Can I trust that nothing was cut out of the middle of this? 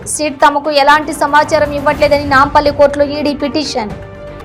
yes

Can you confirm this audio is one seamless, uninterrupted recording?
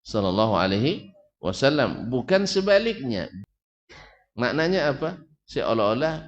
no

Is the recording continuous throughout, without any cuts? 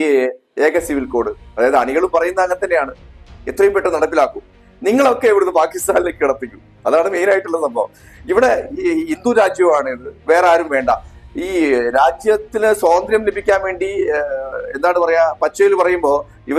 yes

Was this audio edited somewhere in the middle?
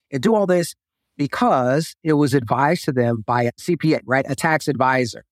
yes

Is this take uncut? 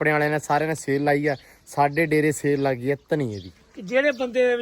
yes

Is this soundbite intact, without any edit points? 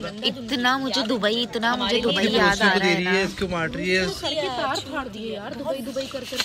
yes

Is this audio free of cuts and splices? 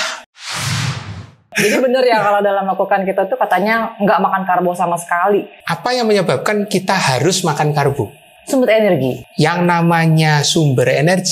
no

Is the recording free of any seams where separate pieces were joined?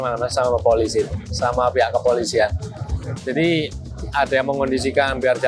yes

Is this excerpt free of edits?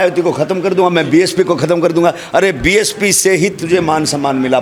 yes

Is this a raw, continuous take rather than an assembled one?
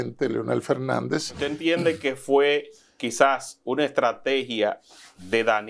no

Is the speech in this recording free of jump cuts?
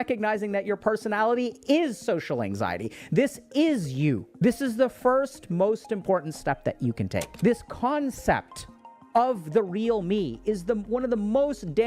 no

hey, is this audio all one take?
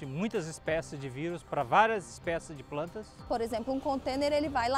no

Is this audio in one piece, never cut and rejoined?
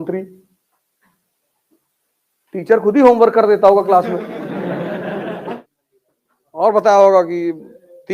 no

